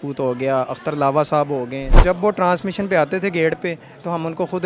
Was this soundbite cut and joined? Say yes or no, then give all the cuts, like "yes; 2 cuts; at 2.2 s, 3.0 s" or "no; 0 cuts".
yes; 1 cut; at 1.9 s